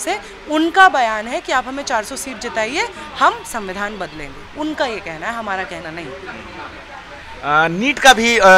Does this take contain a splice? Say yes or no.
no